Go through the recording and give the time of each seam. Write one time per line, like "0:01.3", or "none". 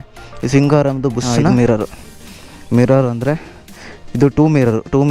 0:01.5